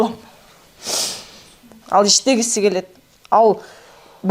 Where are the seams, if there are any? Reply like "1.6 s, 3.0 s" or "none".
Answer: 1.7 s